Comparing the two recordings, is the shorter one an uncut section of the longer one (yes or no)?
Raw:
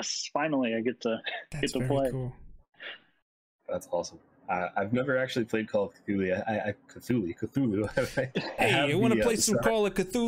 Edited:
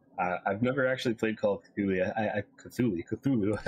yes